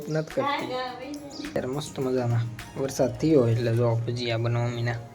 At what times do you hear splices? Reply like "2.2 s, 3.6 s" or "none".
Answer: 1.6 s